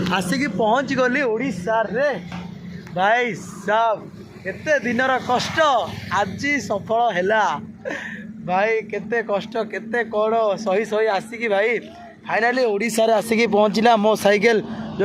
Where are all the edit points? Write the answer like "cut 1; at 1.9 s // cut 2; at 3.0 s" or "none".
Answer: none